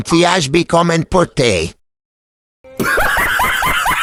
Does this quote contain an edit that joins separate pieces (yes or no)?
no